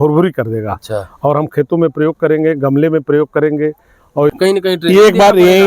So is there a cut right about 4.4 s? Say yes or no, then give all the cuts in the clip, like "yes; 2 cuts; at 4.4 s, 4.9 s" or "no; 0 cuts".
yes; 1 cut; at 4.4 s